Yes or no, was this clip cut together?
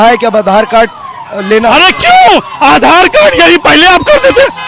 no